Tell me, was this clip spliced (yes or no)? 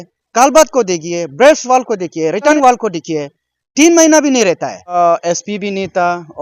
yes